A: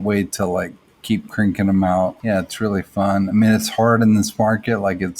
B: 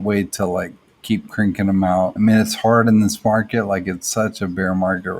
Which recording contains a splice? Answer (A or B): B